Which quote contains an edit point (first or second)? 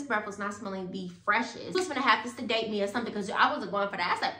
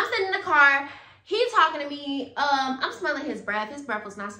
first